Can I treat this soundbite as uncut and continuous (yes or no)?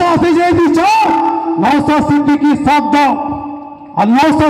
yes